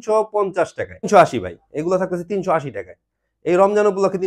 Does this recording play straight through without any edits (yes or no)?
no